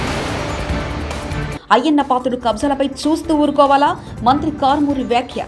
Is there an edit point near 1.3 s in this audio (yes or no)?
yes